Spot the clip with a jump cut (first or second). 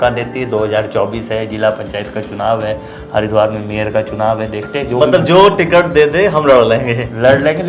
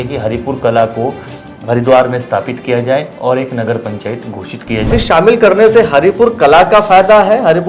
second